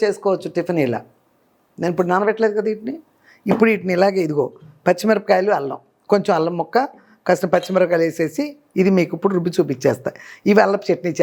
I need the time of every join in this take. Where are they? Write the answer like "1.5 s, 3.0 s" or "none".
none

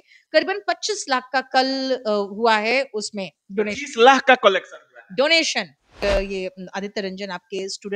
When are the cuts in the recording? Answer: 6.0 s

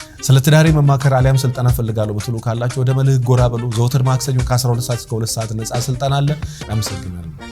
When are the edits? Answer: 6.6 s

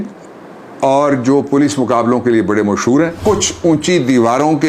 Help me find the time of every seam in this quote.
3.2 s

